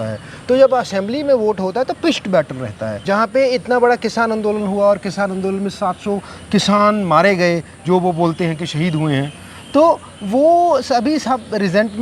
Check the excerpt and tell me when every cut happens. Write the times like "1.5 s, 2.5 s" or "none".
3.0 s

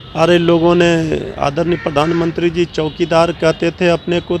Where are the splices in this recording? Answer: none

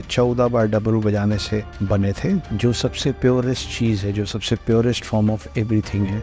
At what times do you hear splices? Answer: 2.4 s

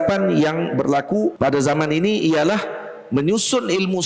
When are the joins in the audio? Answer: 1.4 s

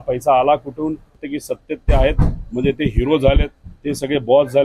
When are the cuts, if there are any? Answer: 1.2 s

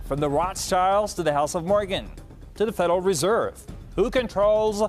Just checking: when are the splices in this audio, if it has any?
2.0 s

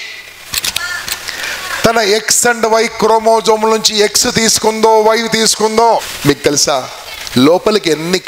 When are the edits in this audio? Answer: 6.1 s

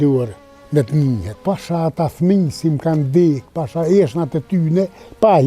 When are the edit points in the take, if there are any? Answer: 1.3 s

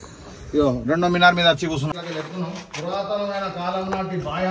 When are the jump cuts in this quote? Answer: 1.9 s

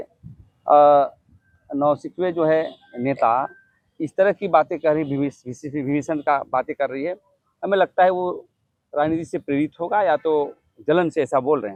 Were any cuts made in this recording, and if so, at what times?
none

